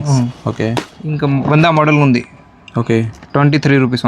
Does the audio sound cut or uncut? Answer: cut